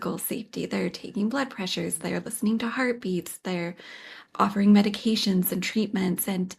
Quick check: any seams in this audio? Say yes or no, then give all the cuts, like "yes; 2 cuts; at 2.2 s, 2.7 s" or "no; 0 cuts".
no; 0 cuts